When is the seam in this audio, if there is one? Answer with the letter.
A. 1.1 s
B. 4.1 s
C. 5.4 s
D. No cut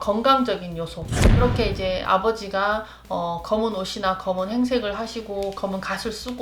A